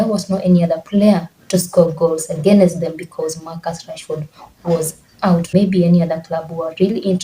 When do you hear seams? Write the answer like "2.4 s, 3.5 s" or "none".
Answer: 5.8 s